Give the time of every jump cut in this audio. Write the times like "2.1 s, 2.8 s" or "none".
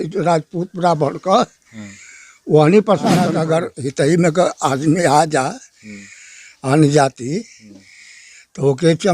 3.4 s